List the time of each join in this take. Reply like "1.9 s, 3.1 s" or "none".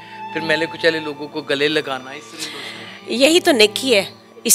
none